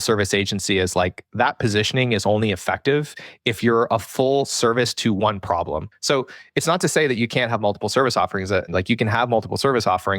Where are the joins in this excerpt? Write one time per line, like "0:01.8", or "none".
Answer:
0:05.9
0:08.7